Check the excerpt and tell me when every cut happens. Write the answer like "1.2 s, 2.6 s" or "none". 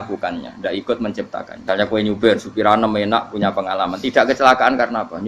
1.5 s